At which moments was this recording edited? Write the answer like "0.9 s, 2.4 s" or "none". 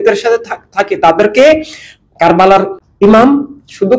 2.8 s